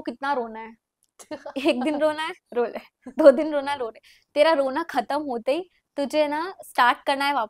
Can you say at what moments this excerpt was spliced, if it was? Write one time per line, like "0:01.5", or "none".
none

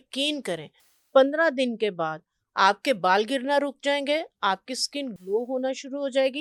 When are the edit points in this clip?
none

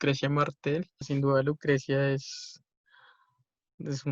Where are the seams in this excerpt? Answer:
0:01.1

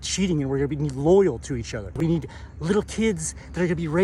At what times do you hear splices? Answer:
0:02.0

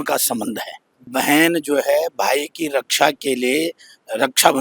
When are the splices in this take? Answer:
0:01.1

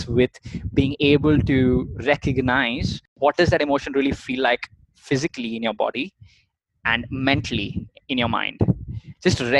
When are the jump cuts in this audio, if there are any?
0:03.1

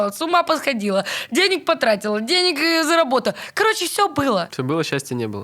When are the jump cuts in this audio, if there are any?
0:04.5

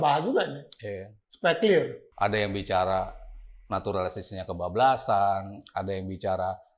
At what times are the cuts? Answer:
0:02.0

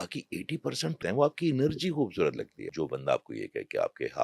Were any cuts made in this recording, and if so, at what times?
0:01.0
0:02.6

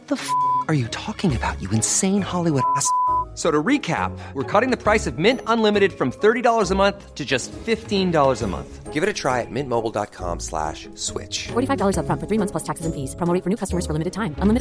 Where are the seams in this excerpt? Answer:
none

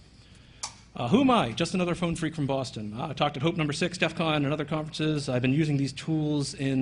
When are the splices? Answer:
0:04.6

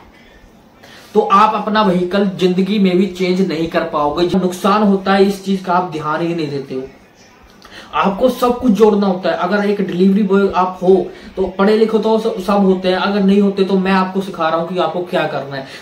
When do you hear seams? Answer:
0:04.3

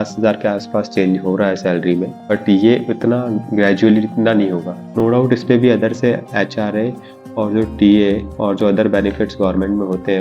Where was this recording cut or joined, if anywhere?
0:02.4
0:05.0

